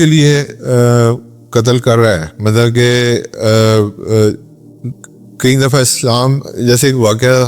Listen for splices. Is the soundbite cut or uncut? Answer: uncut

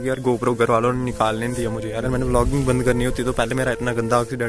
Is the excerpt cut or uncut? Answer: cut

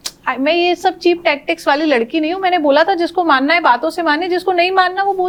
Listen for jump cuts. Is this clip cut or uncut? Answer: uncut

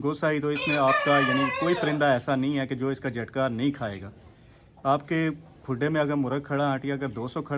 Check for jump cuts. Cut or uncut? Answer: uncut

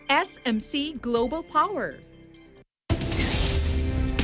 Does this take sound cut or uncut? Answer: cut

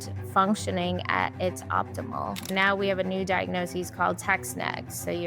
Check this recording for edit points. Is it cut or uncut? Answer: cut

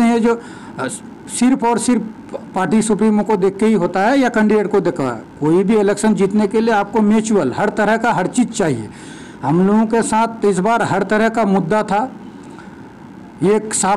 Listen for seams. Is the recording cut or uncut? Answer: uncut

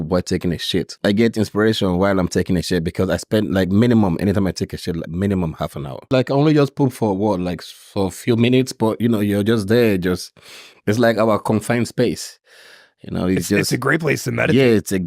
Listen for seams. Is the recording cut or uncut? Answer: cut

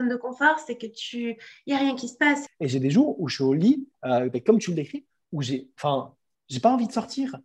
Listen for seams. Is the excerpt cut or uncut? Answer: cut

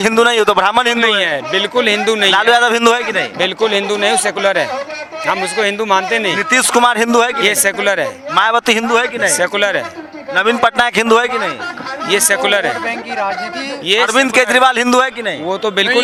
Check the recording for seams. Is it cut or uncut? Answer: uncut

